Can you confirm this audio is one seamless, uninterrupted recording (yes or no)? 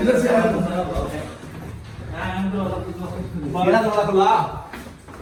yes